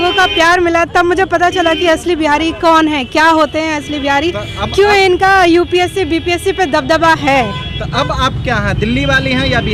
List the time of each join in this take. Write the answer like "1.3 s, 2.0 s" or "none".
none

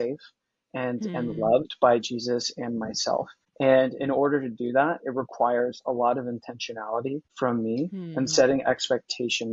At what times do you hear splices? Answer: 3.4 s, 7.3 s

